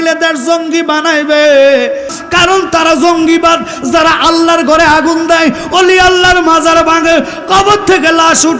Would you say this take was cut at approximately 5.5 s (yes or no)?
no